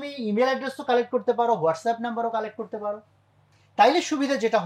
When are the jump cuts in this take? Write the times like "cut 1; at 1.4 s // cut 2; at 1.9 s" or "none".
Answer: none